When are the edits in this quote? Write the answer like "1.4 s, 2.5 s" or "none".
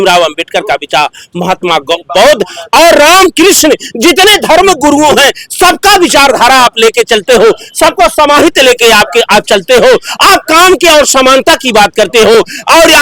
none